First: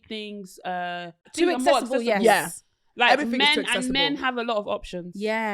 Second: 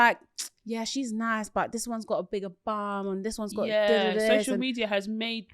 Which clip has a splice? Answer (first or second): first